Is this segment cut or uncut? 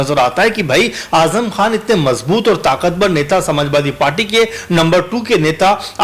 uncut